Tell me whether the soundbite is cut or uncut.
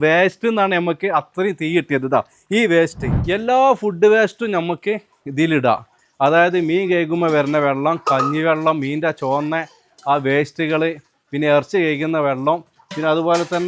cut